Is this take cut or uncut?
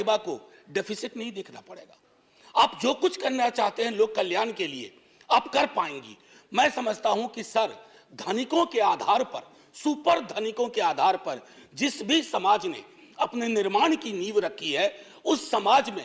uncut